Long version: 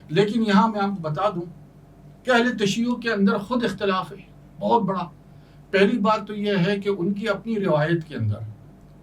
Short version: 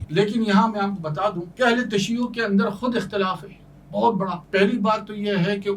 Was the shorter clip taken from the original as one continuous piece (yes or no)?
no